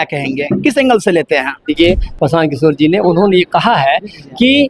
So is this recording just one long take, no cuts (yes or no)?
no